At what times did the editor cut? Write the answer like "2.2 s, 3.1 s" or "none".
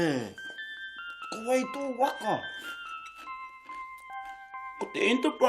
2.5 s, 4.5 s